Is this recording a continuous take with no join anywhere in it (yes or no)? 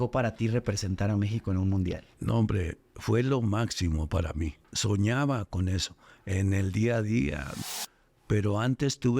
no